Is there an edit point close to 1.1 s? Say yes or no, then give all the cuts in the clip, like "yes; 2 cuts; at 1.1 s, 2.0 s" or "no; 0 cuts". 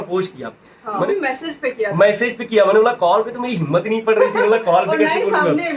yes; 1 cut; at 1.1 s